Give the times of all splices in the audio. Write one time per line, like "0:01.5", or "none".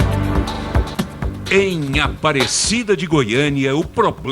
0:00.9